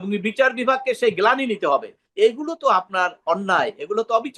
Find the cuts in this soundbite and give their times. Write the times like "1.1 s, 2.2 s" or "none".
2.0 s